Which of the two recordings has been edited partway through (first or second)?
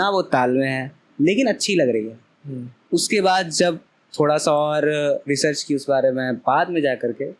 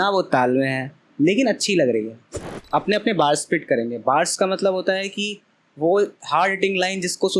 second